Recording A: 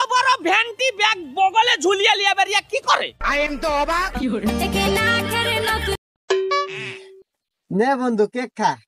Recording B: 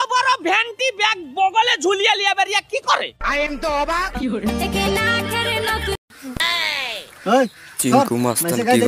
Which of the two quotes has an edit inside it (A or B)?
B